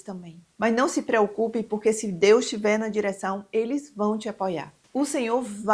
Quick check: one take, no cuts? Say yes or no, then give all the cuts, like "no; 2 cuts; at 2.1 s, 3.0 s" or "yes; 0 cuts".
yes; 0 cuts